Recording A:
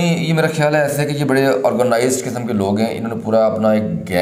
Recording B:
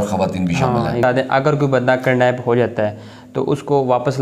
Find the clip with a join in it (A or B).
B